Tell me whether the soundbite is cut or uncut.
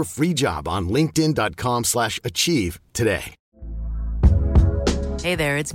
uncut